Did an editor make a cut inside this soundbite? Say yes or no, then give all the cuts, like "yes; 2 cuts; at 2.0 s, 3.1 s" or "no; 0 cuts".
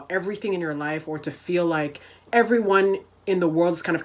no; 0 cuts